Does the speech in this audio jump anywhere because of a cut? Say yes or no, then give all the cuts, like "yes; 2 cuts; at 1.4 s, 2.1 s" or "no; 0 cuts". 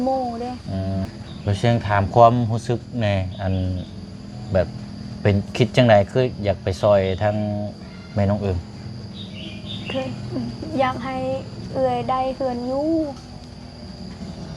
yes; 1 cut; at 1.0 s